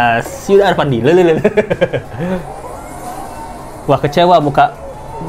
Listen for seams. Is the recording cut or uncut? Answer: uncut